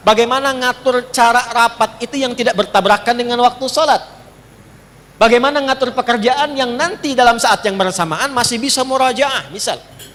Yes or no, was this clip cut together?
no